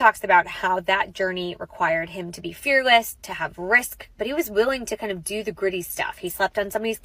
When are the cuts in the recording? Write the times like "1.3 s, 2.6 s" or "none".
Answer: 4.1 s